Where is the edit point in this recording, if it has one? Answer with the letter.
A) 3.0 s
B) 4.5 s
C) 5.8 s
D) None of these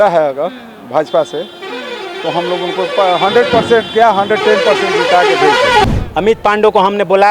C